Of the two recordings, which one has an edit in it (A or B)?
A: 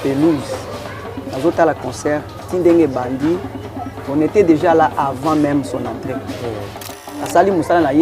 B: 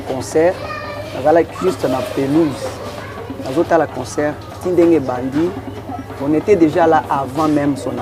A